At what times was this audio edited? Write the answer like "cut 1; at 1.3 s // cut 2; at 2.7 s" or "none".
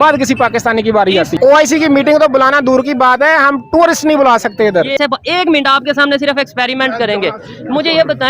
cut 1; at 1.3 s // cut 2; at 4.9 s